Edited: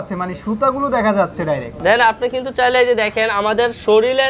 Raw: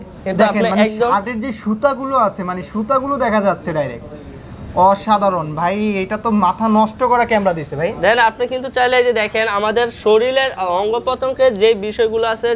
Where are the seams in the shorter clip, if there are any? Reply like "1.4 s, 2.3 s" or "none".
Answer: 1.8 s

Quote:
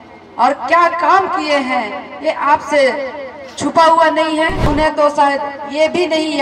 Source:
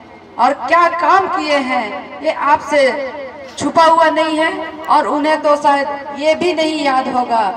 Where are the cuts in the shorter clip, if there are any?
4.7 s

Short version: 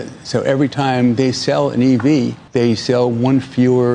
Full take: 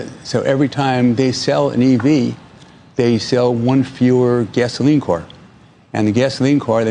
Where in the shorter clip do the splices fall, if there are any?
2.4 s

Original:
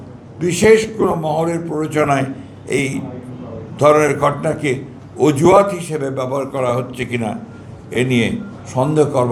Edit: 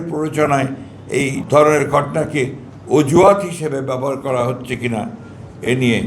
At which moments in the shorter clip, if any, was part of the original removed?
1.4 s

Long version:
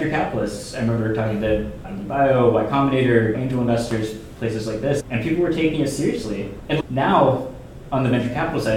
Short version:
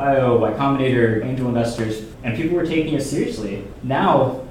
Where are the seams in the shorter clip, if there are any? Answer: 2.2 s, 3.8 s

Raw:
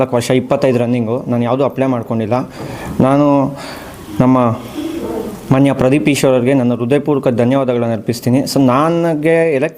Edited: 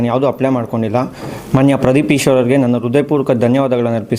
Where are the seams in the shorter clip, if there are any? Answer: 1.3 s

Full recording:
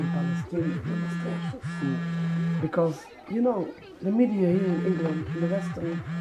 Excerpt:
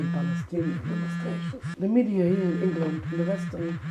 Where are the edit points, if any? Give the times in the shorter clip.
1.6 s

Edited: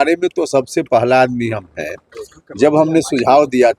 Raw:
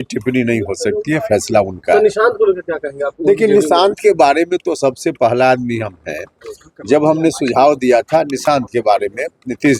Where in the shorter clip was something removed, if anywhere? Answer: none

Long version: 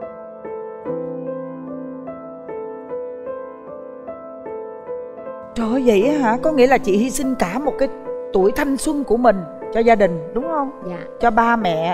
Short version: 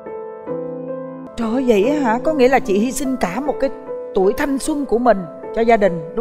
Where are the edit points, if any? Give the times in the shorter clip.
1.3 s

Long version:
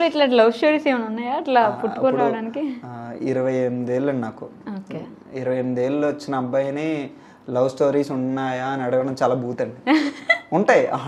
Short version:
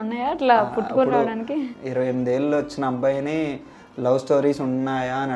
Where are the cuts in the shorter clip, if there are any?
1.8 s

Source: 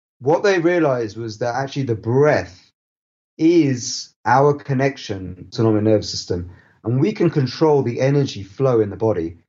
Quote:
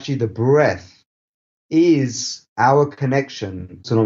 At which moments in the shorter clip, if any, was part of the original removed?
none

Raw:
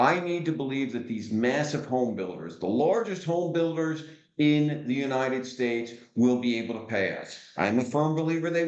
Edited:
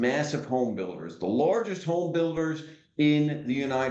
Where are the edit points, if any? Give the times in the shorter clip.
none

